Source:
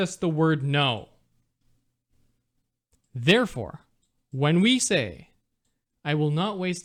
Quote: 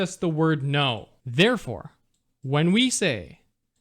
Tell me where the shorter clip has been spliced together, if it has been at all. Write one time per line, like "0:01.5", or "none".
0:01.1